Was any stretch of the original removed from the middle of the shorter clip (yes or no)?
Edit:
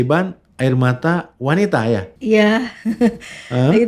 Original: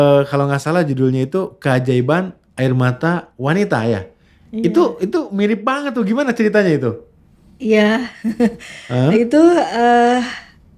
yes